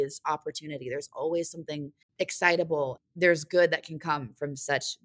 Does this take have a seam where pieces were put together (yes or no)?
yes